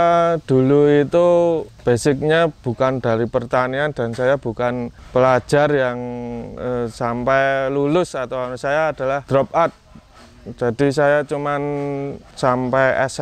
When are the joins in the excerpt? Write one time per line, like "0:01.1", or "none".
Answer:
0:01.7
0:05.0
0:09.2
0:12.2